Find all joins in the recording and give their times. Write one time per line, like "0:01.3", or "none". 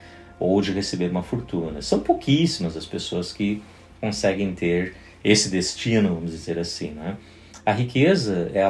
none